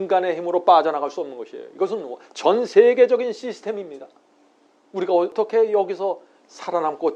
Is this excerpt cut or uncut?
cut